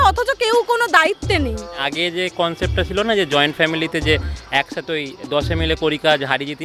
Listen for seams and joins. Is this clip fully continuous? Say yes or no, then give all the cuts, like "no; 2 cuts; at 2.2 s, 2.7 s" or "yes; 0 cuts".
yes; 0 cuts